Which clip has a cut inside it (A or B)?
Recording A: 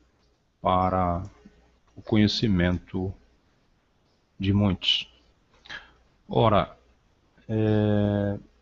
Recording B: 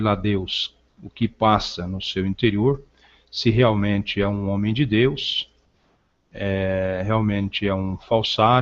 B